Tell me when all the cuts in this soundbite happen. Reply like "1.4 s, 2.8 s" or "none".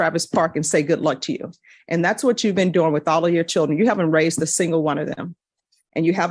none